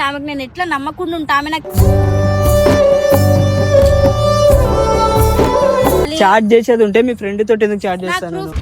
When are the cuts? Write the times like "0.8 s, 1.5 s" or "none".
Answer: 6.1 s